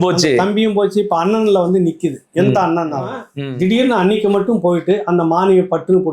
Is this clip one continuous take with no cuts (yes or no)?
no